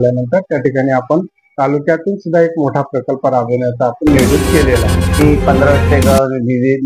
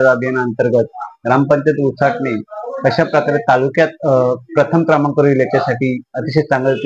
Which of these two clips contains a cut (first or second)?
first